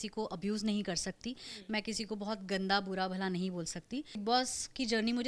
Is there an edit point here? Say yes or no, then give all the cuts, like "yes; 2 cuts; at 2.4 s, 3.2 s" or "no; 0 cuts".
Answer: yes; 1 cut; at 4.2 s